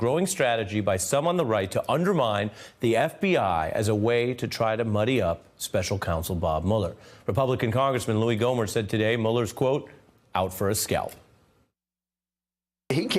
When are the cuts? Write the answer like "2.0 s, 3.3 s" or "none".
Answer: 2.6 s

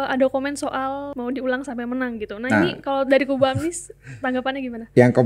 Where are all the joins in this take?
1.1 s

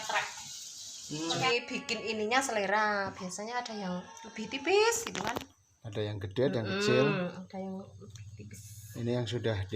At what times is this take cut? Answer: 1.5 s

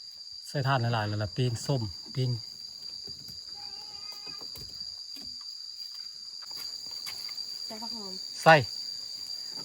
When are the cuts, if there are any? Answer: 6.4 s

